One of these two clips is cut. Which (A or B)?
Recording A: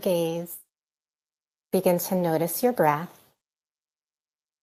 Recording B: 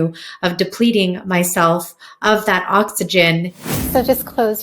B